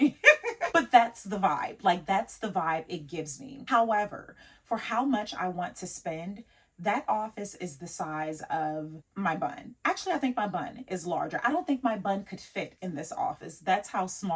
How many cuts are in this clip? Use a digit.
0